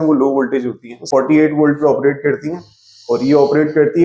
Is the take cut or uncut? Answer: cut